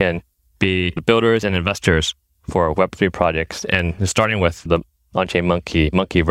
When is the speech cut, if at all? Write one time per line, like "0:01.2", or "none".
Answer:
0:01.0
0:04.7